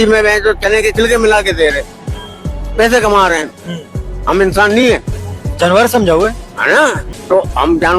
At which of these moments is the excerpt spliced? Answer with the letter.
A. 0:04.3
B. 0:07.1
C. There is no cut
B